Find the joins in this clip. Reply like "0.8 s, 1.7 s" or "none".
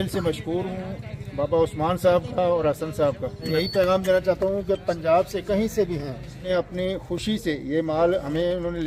3.4 s, 6.3 s